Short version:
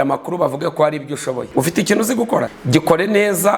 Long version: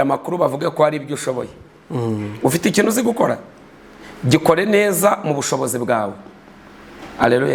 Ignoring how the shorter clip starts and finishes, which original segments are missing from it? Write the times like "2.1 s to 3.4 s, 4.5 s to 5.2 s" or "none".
1.5 s to 2.3 s, 3.4 s to 4.1 s